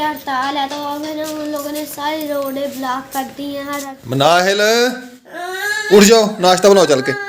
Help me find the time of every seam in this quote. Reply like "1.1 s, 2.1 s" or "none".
3.9 s